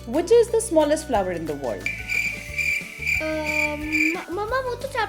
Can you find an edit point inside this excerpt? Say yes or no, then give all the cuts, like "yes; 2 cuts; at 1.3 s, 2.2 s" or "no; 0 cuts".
no; 0 cuts